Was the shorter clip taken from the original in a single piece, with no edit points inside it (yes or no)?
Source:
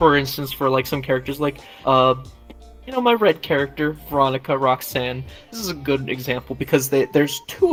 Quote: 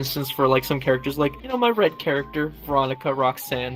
no